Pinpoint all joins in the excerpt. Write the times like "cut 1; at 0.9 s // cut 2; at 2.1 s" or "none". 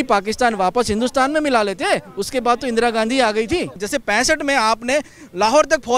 cut 1; at 3.8 s